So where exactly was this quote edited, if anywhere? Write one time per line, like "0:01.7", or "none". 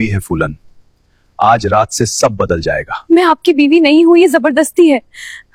none